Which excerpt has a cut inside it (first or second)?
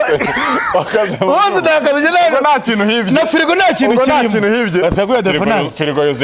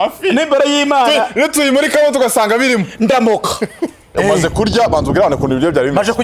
second